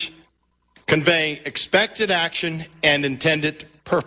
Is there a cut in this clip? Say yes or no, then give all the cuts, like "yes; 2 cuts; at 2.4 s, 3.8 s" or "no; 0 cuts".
yes; 1 cut; at 1.5 s